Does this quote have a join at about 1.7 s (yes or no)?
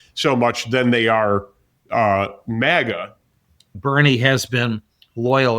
no